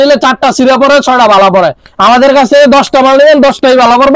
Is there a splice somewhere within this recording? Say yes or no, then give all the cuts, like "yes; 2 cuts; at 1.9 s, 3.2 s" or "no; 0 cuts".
no; 0 cuts